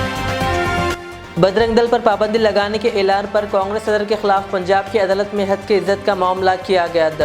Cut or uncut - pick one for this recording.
cut